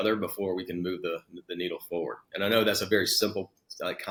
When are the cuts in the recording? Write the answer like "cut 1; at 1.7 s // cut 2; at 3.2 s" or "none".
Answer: none